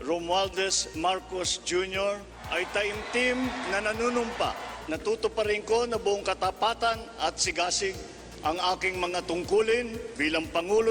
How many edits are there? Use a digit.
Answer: 4